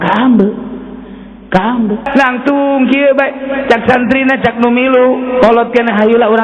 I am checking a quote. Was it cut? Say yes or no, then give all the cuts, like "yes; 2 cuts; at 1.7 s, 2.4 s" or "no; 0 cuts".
yes; 1 cut; at 2.1 s